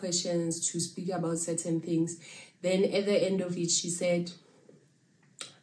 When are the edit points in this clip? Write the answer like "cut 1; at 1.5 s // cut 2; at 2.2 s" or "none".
none